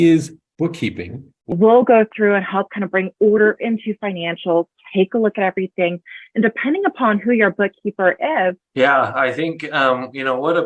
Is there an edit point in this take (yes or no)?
yes